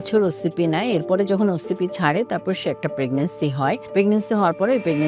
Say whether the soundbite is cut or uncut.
cut